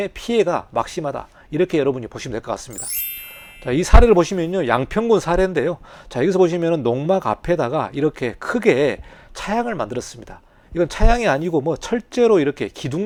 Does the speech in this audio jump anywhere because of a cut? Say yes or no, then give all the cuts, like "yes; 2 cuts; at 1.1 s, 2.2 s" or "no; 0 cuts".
no; 0 cuts